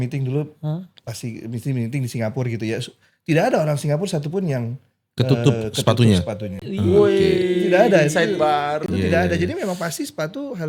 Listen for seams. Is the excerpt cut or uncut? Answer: uncut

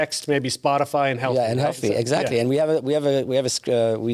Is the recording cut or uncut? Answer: uncut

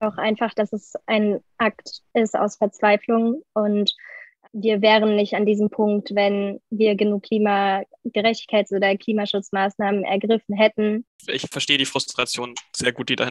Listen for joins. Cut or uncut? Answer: cut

